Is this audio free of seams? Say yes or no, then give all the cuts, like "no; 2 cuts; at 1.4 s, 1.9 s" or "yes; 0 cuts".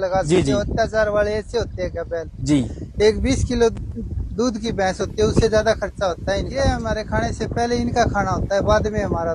no; 1 cut; at 6.5 s